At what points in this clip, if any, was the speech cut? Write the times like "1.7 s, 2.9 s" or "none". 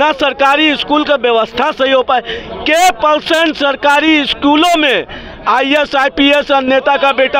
none

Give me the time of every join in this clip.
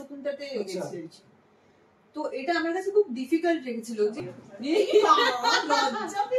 4.2 s

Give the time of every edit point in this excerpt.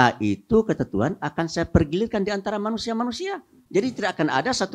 3.5 s

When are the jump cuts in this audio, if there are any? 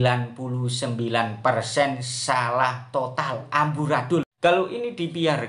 4.3 s

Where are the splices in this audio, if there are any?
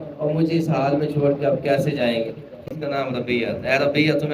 2.7 s

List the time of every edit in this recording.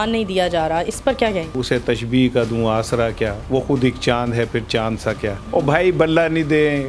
1.6 s, 3.4 s, 5.4 s

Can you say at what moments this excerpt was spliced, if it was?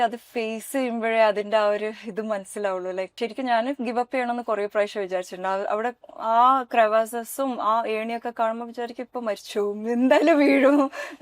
3.1 s

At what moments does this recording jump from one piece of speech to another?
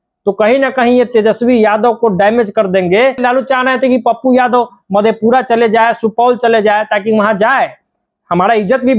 3.2 s

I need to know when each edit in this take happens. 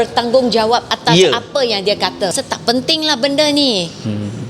2.3 s

